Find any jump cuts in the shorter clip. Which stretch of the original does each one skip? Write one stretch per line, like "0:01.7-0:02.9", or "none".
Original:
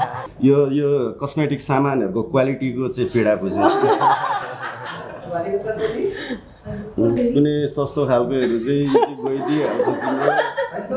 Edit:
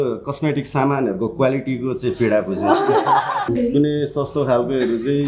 0:04.4-0:07.1